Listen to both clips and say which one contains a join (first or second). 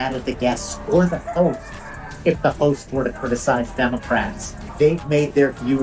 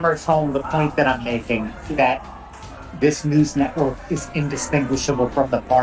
first